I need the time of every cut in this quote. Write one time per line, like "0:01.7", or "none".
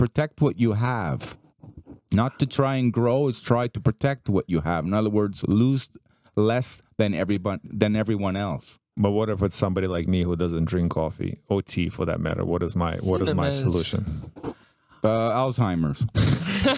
0:08.9